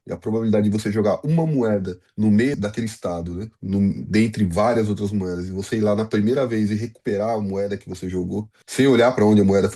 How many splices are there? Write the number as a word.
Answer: three